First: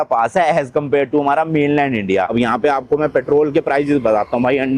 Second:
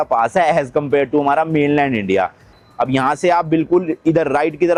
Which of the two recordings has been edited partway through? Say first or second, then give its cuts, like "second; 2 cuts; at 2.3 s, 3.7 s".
first; 1 cut; at 2.3 s